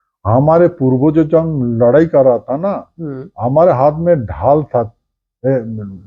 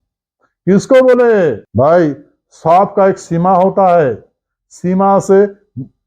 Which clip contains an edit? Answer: second; 1 cut; at 1.6 s

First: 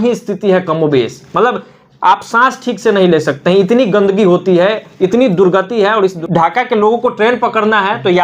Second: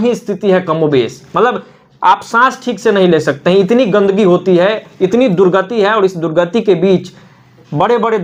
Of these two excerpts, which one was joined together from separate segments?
first; 1 cut; at 6.2 s

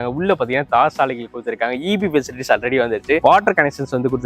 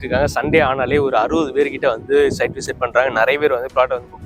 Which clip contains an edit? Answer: first; 1 cut; at 3.2 s

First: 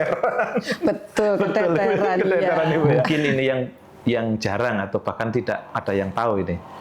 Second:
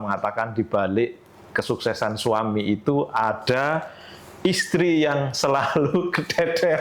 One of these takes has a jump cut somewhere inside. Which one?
first; 1 cut; at 3.1 s

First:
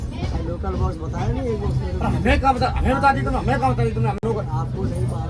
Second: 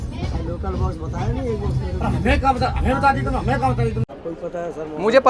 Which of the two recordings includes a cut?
second; 1 cut; at 4.0 s

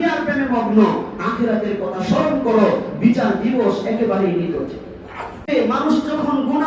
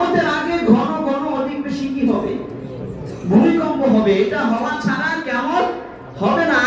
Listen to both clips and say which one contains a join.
first; 1 cut; at 5.5 s

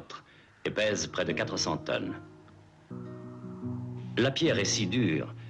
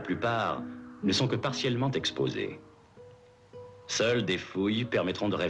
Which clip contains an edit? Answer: first; 1 cut; at 2.9 s

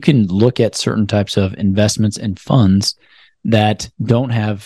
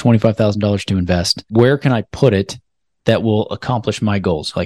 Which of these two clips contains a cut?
second; 1 cut; at 1.4 s

